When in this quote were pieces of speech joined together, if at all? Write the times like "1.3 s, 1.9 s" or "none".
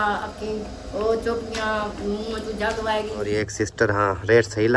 3.3 s

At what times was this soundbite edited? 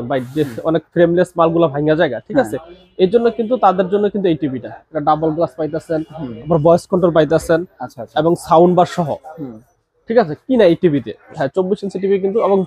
11.3 s

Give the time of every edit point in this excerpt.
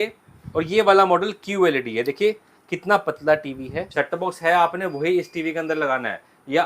3.8 s

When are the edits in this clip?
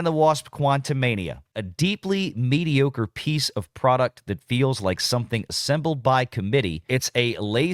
1.6 s, 6.9 s

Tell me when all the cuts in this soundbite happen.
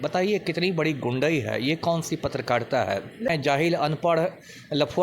3.3 s

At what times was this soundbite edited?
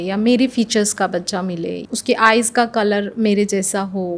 1.8 s

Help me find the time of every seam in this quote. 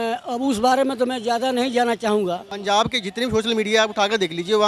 2.5 s

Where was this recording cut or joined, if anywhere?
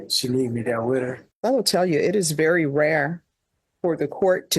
1.2 s

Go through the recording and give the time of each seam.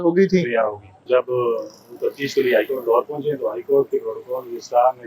1.0 s

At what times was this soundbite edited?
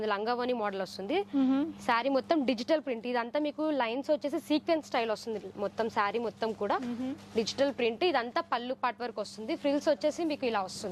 none

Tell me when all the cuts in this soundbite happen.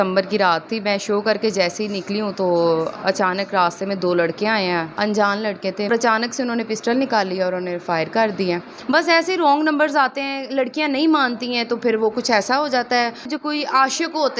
4.9 s, 5.9 s, 8.7 s, 13.3 s

